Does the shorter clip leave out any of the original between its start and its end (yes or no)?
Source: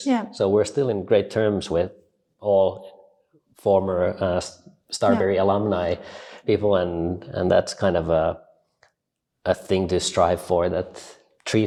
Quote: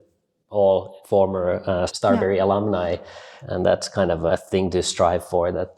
yes